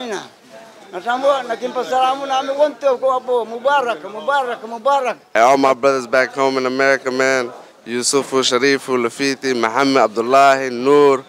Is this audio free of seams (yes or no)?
no